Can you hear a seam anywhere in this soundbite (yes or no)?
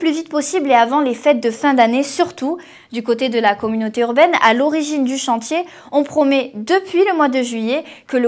no